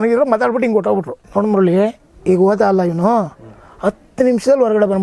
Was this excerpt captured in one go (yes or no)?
no